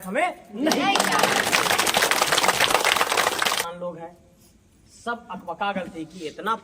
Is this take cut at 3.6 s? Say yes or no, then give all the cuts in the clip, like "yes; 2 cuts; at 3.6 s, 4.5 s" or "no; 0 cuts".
yes; 1 cut; at 3.6 s